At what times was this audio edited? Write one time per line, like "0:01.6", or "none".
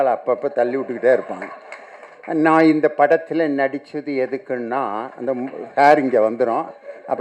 none

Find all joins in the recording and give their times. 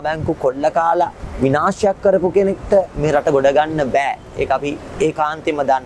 none

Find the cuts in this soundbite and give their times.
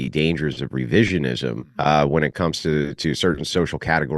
0:01.7

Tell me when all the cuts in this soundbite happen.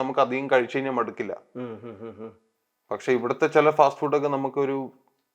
none

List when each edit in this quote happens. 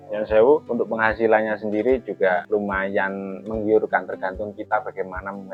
none

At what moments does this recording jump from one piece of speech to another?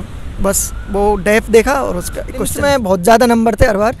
0:02.5

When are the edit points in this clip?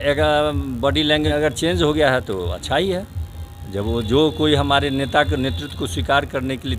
0:01.3

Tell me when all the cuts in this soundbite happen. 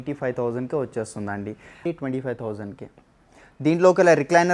0:01.8

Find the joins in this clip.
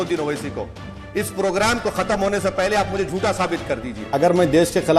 0:04.1

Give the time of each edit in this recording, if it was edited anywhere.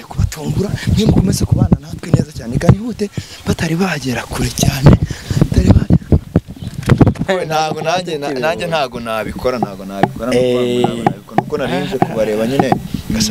0:07.2

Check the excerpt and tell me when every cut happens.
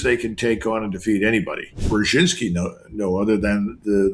0:01.8

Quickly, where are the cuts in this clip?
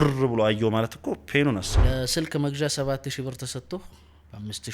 0:01.8

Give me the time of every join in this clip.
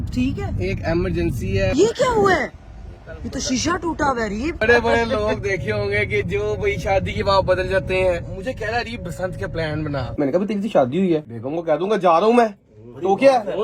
0:01.7
0:04.6
0:08.3
0:10.1

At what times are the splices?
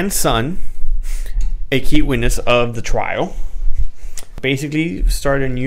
0:04.3

